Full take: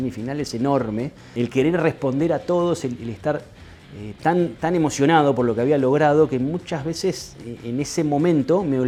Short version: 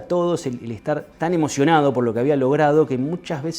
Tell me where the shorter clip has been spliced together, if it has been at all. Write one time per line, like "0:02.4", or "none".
0:01.1